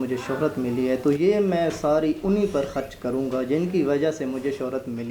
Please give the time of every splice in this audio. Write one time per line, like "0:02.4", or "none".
none